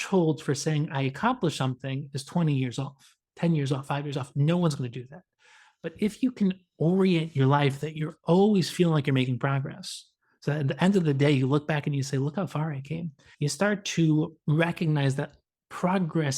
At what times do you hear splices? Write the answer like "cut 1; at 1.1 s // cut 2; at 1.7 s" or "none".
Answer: cut 1; at 13.2 s // cut 2; at 14.4 s